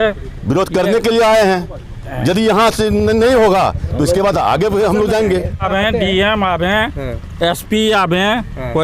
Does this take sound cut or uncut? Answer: cut